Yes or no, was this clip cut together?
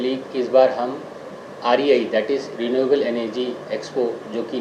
no